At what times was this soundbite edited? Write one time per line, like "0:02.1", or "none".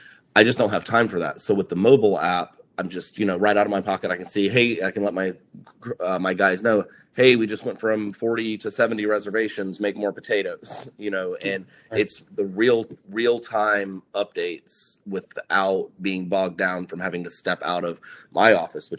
none